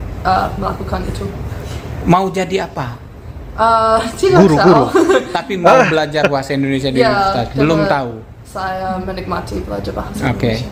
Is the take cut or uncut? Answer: uncut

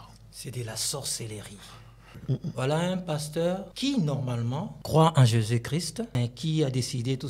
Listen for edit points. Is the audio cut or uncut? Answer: cut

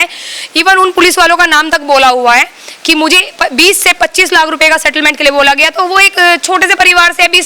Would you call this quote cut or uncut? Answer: uncut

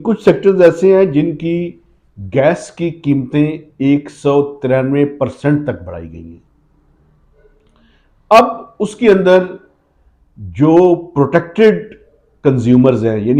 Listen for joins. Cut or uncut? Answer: uncut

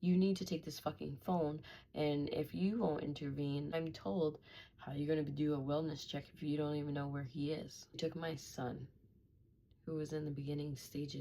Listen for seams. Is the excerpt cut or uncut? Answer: cut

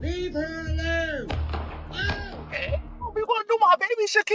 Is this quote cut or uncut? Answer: uncut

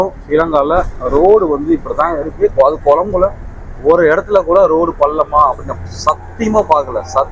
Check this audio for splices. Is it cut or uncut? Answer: uncut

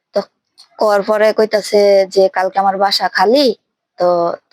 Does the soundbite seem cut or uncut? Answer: uncut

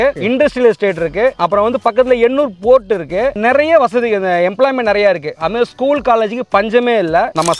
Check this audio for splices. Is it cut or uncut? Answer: uncut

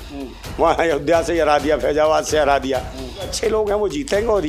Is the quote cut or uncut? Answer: cut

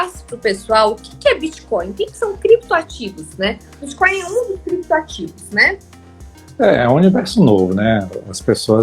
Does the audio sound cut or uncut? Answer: uncut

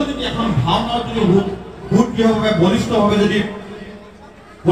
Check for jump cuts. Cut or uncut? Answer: uncut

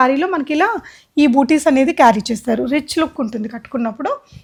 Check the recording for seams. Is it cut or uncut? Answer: uncut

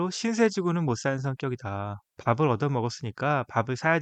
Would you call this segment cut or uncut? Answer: uncut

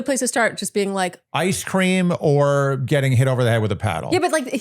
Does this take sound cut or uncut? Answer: cut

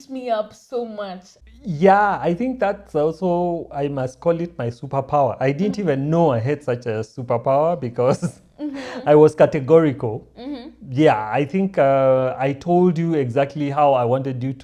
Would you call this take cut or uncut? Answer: cut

